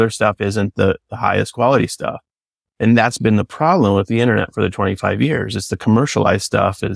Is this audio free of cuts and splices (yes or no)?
yes